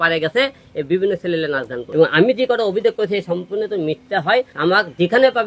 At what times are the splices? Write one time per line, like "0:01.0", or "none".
0:01.8
0:04.5